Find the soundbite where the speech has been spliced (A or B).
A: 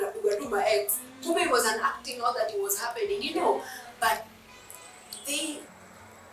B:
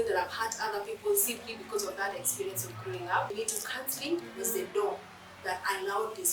B